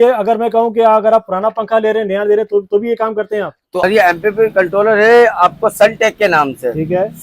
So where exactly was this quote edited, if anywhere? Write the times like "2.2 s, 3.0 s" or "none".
3.8 s

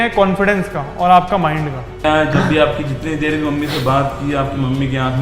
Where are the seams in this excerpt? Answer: 2.0 s

